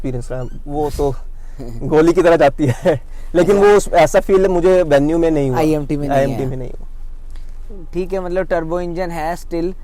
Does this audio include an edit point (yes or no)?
no